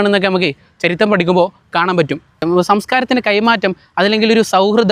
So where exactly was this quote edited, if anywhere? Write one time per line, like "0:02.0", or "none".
0:02.4